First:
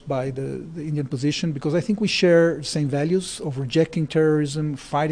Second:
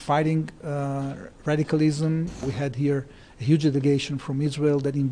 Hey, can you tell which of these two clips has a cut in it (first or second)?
second